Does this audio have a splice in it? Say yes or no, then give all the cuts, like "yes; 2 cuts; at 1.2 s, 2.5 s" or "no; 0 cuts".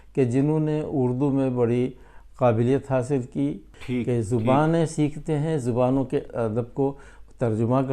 yes; 2 cuts; at 3.7 s, 6.3 s